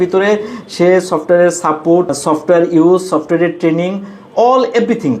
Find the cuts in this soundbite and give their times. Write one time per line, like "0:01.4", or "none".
0:02.1

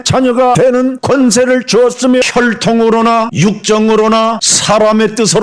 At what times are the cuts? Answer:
0:02.2

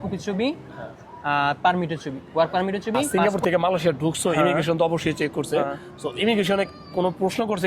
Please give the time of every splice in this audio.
0:03.1

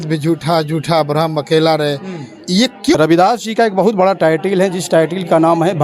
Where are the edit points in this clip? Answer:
0:03.0

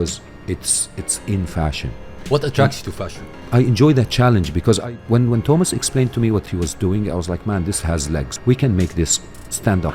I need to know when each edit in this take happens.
0:02.2
0:03.4
0:06.5
0:08.3

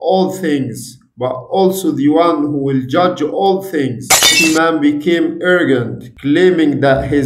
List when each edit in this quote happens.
0:04.3

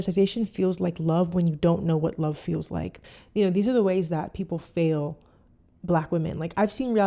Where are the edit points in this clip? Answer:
0:03.0

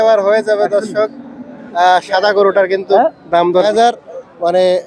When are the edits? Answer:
0:03.6

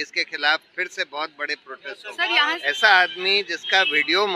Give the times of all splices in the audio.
0:02.6

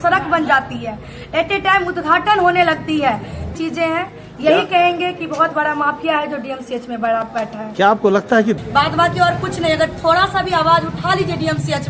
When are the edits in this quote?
0:03.5
0:08.6

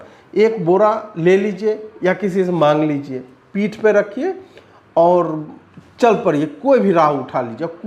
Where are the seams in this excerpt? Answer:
none

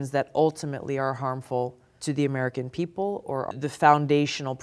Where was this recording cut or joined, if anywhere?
0:01.9
0:03.5

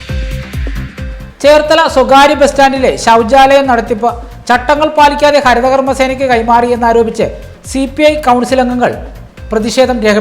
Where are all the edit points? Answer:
none

